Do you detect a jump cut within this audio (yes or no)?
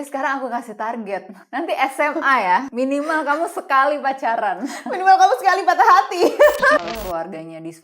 yes